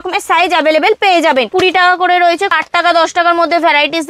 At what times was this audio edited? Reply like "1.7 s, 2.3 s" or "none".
1.5 s, 2.5 s